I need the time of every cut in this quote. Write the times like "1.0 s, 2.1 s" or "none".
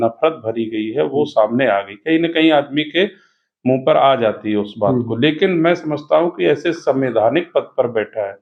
none